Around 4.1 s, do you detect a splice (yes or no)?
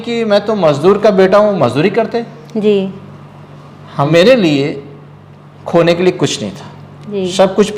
yes